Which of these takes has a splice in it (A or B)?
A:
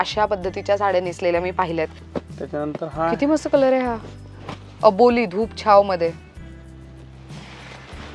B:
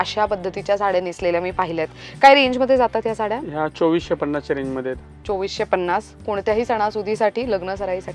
A